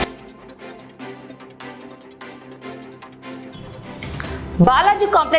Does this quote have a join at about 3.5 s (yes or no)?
yes